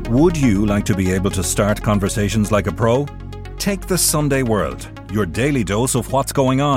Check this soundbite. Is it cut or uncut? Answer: uncut